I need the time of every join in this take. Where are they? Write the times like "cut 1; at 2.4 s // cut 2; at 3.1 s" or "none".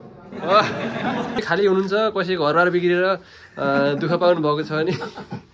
cut 1; at 1.4 s